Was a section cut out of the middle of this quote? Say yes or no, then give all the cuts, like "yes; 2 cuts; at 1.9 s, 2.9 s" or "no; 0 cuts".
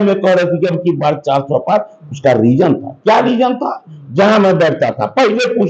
no; 0 cuts